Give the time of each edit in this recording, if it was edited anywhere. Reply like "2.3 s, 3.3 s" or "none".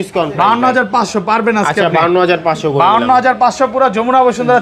none

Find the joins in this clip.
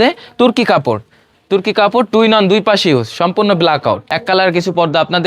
4.1 s

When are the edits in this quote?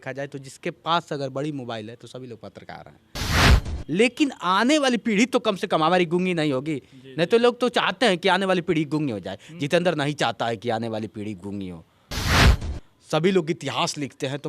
3.4 s, 12.4 s

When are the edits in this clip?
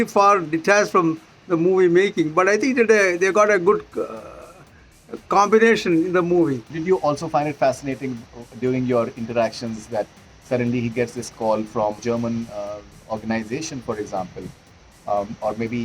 6.7 s, 12.0 s

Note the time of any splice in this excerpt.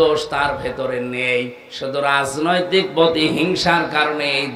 none

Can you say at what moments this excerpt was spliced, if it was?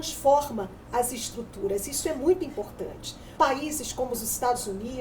3.2 s

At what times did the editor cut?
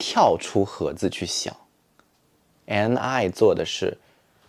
none

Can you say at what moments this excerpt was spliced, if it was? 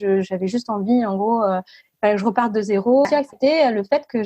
3.1 s

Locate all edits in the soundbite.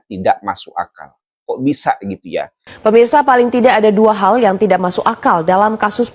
2.6 s

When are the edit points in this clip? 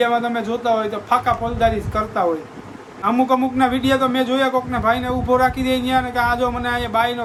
none

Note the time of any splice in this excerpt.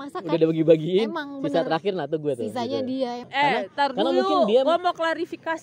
3.2 s

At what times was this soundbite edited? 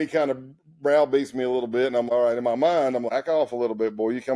2.1 s, 3.1 s

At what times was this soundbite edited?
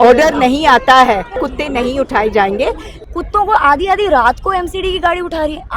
1.5 s, 2.9 s

